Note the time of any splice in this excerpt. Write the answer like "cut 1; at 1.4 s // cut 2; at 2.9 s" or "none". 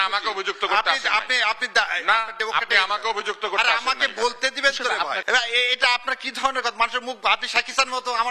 cut 1; at 5.2 s